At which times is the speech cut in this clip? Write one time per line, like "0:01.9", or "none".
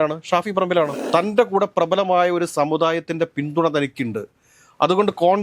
0:01.0